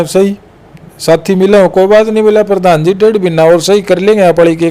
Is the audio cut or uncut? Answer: uncut